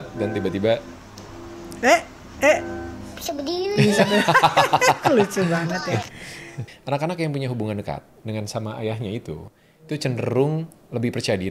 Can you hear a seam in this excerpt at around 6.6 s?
yes; 1 cut; at 6.6 s

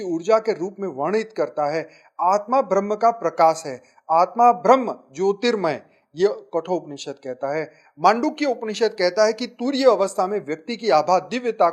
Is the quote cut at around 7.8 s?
no; 0 cuts

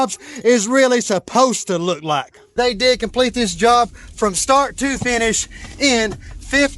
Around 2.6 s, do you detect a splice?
yes; 1 cut; at 2.6 s

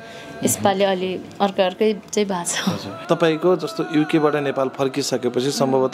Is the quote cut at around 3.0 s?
yes; 1 cut; at 3.0 s

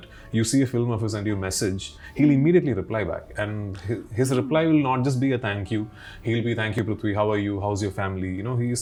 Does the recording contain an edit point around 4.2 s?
no; 0 cuts

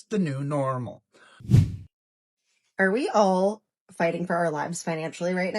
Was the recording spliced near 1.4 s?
yes; 1 cut; at 1.4 s

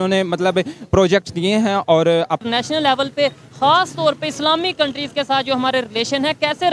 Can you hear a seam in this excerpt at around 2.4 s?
yes; 1 cut; at 2.4 s

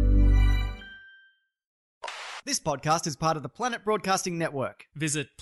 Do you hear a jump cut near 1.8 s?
yes; 1 cut; at 1.8 s

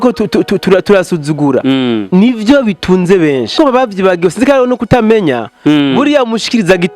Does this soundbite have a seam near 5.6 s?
no; 1 cut; at 3.6 s

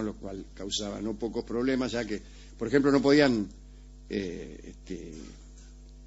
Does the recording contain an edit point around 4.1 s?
no; 1 cut; at 2.9 s

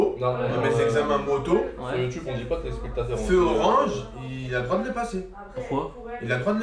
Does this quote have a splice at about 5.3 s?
no; 0 cuts

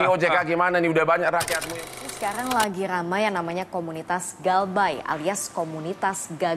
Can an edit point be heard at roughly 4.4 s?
no; 1 cut; at 1.9 s

